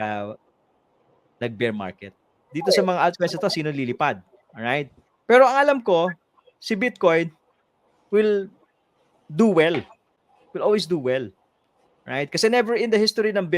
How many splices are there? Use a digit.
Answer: 1